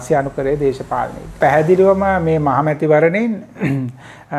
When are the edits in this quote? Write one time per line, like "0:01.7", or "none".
0:01.4